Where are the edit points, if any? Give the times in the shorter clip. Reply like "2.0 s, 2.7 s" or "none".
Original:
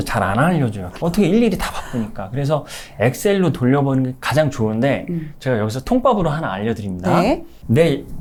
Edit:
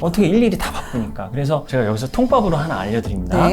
1.7 s

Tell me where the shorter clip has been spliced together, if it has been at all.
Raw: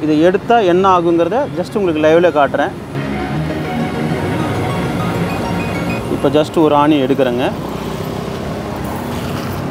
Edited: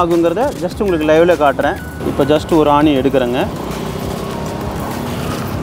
1.9 s

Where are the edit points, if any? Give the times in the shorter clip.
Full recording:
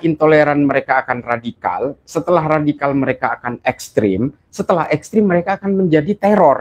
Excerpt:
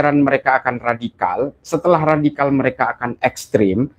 none

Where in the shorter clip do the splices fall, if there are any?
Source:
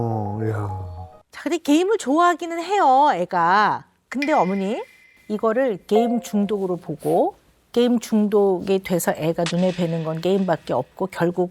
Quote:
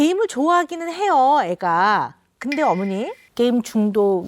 3.2 s

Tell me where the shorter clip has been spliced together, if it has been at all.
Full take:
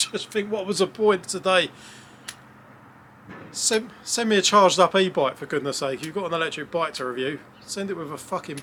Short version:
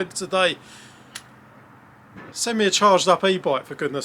2.3 s

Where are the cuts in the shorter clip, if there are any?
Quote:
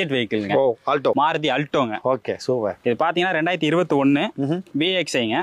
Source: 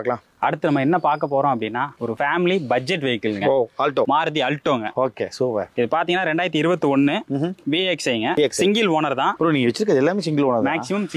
none

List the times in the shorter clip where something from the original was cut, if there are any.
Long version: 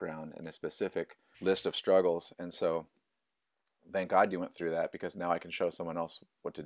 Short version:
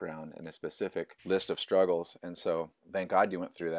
1.2 s, 2.8 s

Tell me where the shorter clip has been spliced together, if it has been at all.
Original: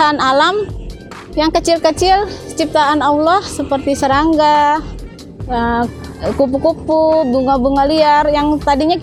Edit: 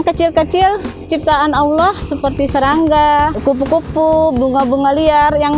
3.4 s

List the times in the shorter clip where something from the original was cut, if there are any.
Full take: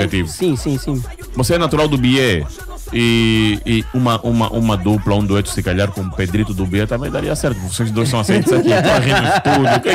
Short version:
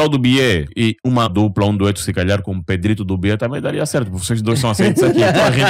1.2 s

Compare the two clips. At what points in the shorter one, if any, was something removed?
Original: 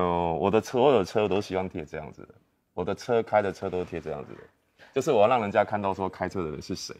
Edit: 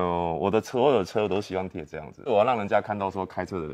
2.2 s

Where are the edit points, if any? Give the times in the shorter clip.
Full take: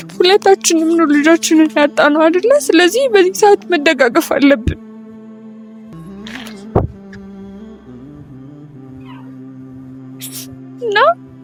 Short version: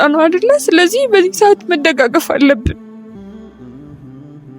3.2 s

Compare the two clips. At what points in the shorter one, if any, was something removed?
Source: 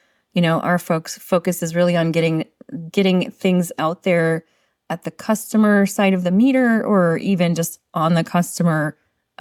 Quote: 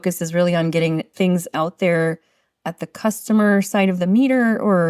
1.1 s

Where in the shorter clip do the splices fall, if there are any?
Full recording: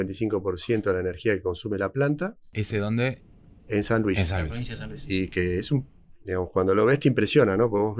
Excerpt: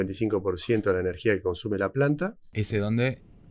none

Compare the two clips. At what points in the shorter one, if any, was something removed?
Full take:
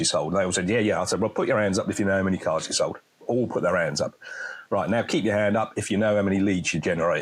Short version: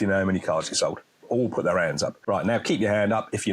2.2 s

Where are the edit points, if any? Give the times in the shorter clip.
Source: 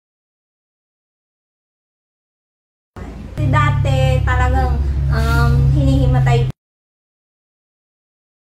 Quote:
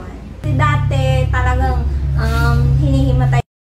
none

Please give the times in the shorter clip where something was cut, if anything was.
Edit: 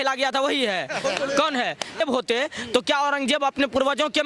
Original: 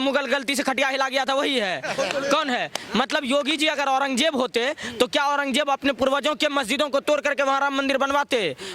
2.0 s

